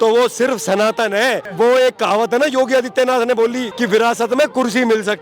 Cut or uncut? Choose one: cut